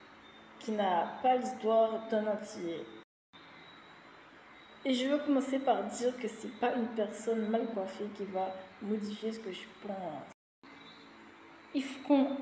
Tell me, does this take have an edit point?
no; 0 cuts

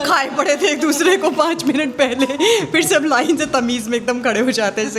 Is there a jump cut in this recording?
no; 0 cuts

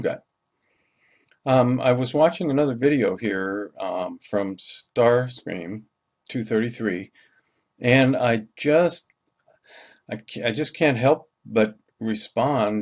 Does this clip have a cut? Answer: no; 0 cuts

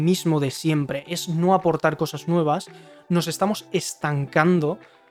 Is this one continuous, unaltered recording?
yes; 0 cuts

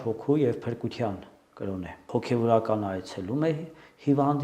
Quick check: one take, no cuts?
no; 1 cut; at 1.9 s

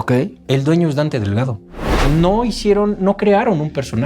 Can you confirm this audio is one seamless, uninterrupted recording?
no; 1 cut; at 1.9 s

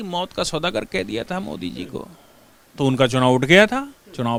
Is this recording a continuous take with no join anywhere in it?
yes; 0 cuts

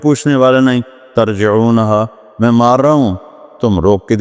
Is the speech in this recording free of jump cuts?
yes; 0 cuts

